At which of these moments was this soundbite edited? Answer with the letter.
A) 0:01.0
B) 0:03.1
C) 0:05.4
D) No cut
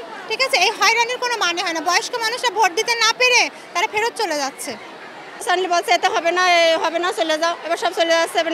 C